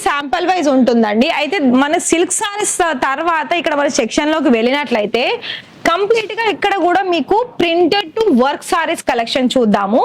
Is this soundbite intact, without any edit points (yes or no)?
yes